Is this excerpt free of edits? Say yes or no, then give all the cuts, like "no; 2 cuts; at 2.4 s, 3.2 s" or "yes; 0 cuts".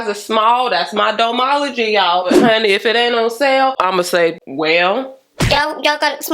no; 2 cuts; at 2.3 s, 5.6 s